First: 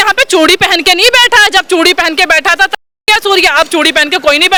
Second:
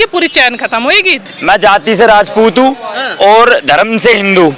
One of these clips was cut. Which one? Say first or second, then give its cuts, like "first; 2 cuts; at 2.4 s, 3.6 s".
second; 1 cut; at 1.2 s